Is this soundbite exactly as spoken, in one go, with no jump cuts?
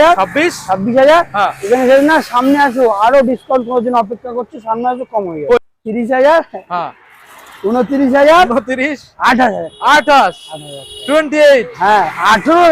no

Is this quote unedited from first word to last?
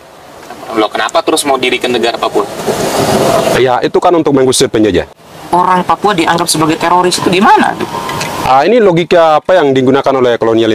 no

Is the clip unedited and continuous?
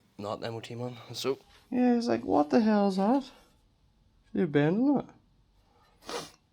no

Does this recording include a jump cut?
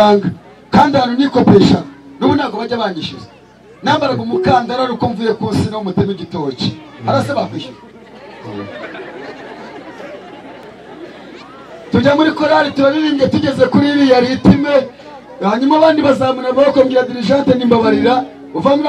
yes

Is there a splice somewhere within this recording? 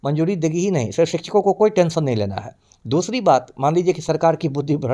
no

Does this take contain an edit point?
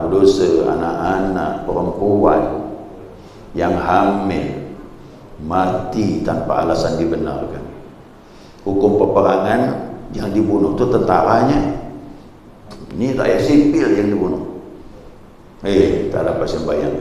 no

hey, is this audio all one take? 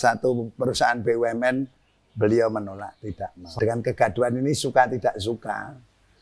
no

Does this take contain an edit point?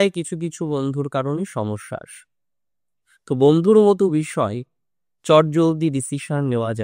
no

